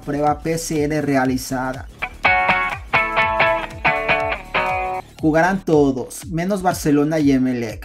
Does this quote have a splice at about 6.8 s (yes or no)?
no